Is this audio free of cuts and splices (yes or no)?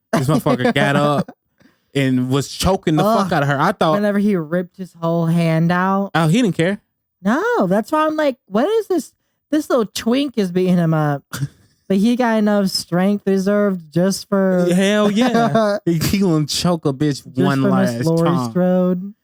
yes